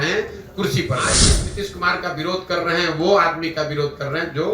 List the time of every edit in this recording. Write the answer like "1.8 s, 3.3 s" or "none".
1.2 s